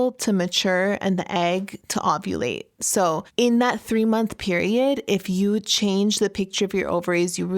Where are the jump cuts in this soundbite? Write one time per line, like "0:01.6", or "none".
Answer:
0:03.3